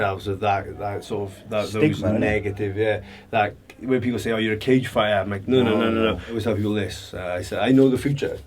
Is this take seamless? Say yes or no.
no